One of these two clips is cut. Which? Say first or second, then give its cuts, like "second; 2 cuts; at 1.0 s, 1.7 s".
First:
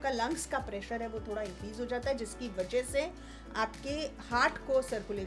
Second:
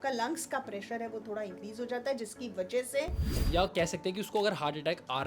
second; 1 cut; at 3.4 s